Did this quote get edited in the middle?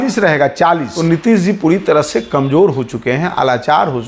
yes; 1 cut; at 0.9 s

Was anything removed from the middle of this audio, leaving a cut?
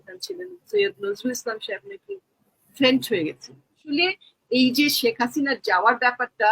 yes; 1 cut; at 3.9 s

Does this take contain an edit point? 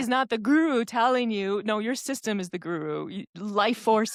no; 0 cuts

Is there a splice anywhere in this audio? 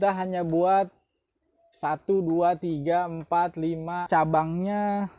yes; 1 cut; at 4.0 s

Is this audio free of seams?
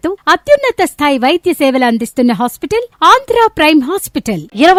yes; 0 cuts

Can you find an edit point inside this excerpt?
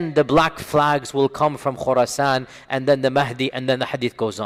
no; 0 cuts

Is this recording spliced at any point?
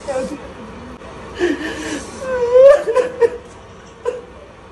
yes; 1 cut; at 1.0 s

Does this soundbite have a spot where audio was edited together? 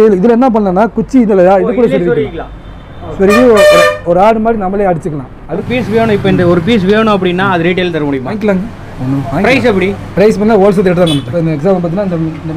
yes; 3 cuts; at 5.6 s, 8.3 s, 11.3 s

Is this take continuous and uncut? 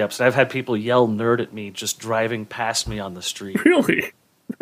yes; 0 cuts

